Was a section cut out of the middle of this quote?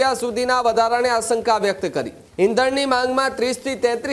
yes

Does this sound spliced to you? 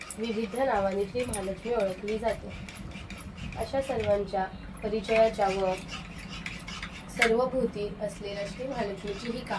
no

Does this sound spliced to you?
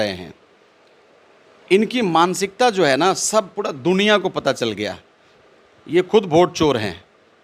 no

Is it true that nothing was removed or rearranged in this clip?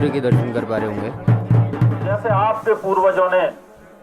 no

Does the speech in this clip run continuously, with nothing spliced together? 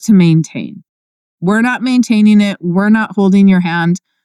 yes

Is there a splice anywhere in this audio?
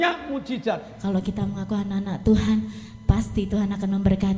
yes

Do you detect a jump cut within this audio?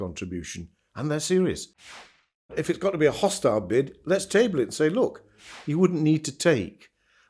yes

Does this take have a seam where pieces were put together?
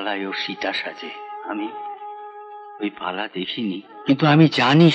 yes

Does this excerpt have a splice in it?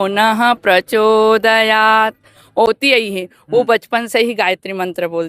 no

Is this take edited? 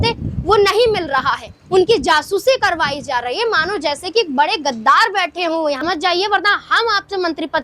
yes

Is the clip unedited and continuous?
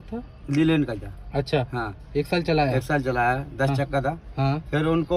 yes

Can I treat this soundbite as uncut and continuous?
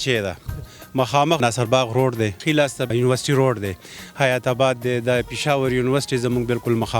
no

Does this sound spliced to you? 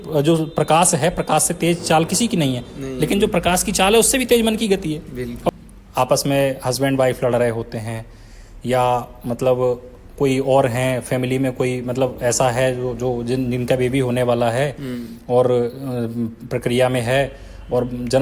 yes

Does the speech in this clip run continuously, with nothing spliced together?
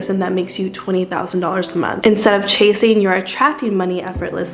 no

